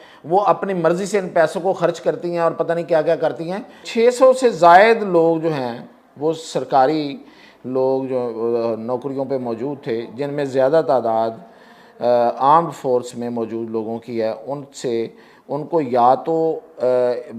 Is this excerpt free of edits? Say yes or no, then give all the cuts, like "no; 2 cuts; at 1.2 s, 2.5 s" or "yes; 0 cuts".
no; 1 cut; at 3.9 s